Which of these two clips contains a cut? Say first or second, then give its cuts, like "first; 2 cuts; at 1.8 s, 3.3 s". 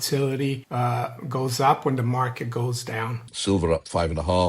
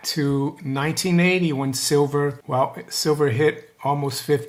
first; 1 cut; at 3.3 s